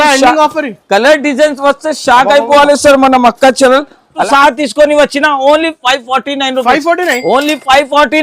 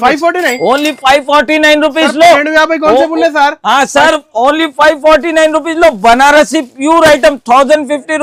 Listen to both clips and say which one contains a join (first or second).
first